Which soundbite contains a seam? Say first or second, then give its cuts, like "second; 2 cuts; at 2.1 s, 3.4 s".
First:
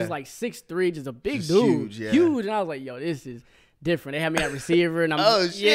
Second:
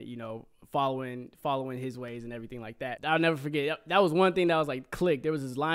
second; 1 cut; at 3.0 s